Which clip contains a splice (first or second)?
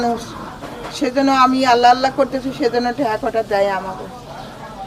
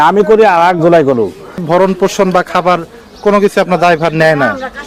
second